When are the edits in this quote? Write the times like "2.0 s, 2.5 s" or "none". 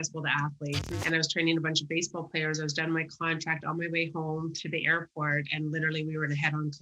0.9 s

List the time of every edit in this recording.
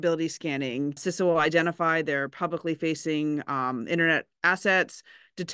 1.0 s

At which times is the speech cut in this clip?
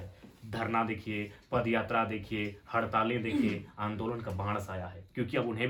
none

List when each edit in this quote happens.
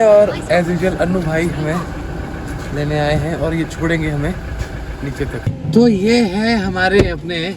5.4 s

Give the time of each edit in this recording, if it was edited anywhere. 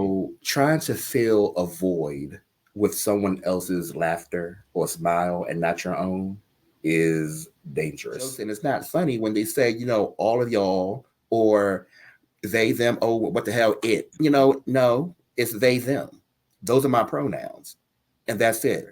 8.5 s

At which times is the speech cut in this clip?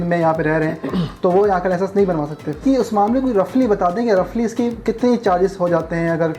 2.6 s

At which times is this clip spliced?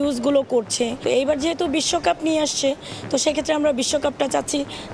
1.0 s

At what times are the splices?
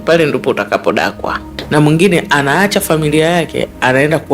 1.5 s

